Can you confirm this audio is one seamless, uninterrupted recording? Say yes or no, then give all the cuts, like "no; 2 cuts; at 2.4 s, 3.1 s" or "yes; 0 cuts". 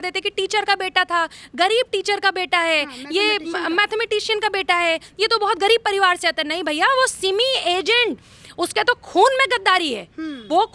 yes; 0 cuts